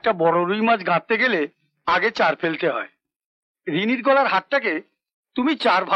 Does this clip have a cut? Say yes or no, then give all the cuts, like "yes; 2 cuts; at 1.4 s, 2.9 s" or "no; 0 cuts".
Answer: no; 0 cuts